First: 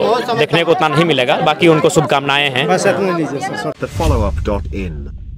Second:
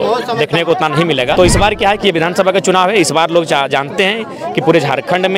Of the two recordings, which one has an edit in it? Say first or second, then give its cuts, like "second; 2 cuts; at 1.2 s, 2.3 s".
second; 1 cut; at 1.4 s